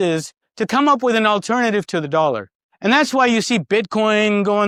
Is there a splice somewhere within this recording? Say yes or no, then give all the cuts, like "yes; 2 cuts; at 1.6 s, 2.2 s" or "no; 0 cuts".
no; 0 cuts